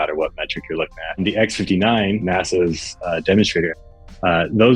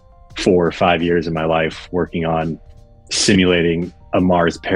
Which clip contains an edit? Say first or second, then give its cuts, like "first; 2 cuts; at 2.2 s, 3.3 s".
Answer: first; 3 cuts; at 1.2 s, 2.2 s, 3.8 s